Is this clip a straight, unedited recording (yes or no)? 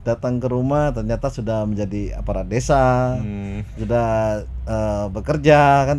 yes